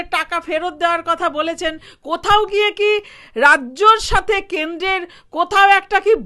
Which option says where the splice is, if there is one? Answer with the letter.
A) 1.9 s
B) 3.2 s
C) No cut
A